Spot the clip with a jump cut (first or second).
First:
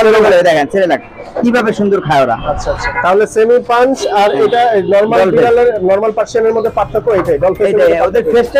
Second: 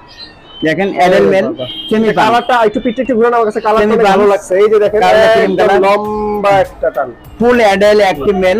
first